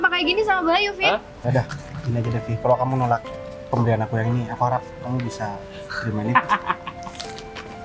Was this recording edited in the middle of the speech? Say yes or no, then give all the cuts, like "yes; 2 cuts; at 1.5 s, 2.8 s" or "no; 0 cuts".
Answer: yes; 1 cut; at 1.4 s